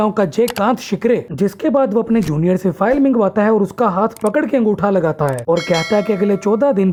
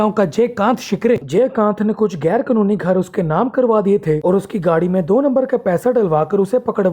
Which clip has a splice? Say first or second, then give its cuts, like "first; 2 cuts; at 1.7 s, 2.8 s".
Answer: second; 1 cut; at 1.3 s